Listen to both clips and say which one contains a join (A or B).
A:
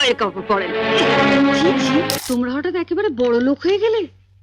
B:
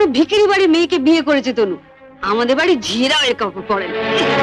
A